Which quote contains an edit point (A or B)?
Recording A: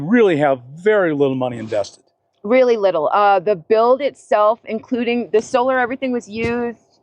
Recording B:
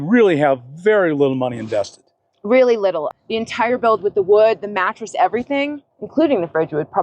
B